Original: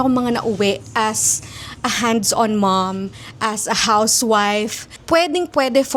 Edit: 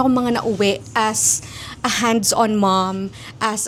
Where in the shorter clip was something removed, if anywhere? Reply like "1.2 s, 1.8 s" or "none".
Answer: none